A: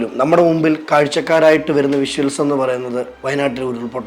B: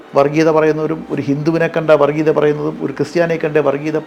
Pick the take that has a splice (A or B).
A